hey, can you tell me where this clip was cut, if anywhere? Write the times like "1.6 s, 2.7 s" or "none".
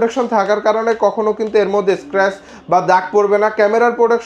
none